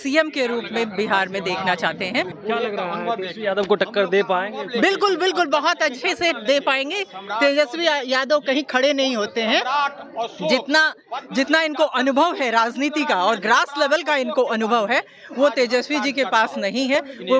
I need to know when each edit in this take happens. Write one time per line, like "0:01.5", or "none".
0:02.3